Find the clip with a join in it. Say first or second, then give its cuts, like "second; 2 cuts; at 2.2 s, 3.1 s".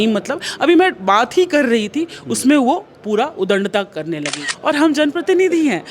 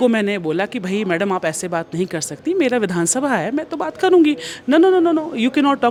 first; 1 cut; at 4.4 s